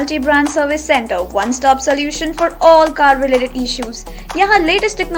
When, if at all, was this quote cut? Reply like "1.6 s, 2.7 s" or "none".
none